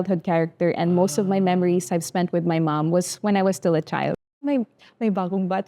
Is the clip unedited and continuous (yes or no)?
no